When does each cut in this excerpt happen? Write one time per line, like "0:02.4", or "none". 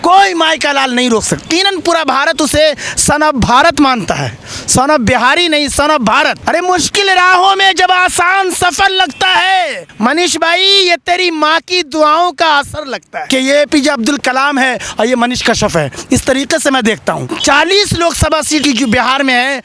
0:01.5
0:06.4
0:09.8
0:13.2
0:17.3
0:18.6

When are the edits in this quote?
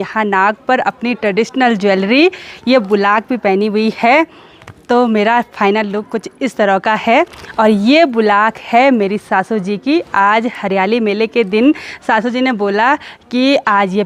none

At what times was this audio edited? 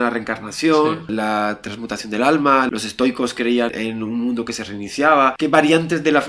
0:01.1
0:02.7
0:03.7
0:05.3

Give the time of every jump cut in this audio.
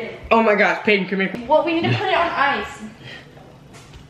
0:01.3

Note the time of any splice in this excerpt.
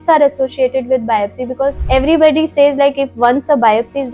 0:01.8

